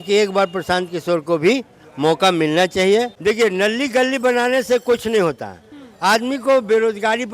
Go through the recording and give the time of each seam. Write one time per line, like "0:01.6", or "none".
0:03.1